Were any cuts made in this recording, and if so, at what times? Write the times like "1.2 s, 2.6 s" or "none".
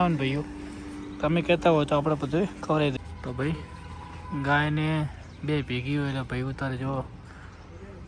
2.9 s